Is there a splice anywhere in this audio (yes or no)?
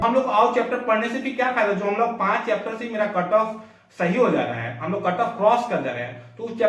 no